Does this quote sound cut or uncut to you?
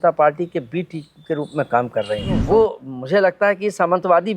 cut